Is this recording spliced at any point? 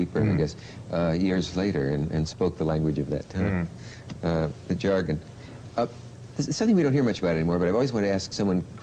yes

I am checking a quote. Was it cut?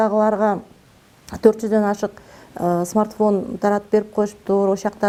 no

